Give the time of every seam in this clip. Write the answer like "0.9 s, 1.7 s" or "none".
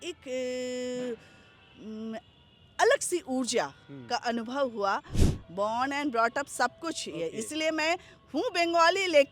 5.2 s